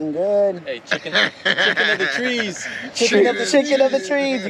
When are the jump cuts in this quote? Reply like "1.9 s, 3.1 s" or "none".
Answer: none